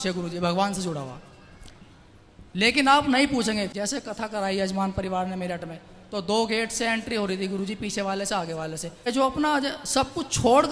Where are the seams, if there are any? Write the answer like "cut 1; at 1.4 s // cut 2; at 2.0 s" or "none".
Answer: cut 1; at 3.7 s // cut 2; at 8.9 s